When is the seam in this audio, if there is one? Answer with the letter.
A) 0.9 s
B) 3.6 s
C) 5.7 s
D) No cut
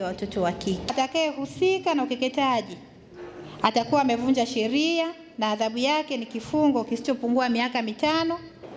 A